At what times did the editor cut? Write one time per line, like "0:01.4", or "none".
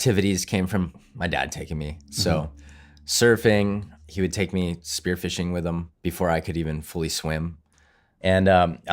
0:01.0
0:03.9
0:05.9
0:07.7